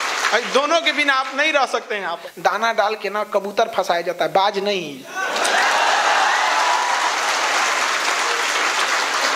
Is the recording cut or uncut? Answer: cut